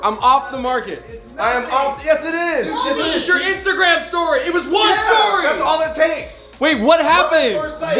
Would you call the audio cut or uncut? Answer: uncut